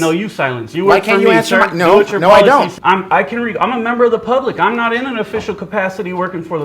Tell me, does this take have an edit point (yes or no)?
yes